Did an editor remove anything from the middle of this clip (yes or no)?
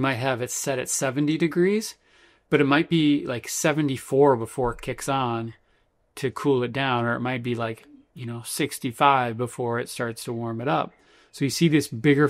no